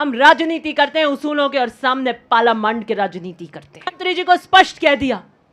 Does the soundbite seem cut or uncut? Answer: cut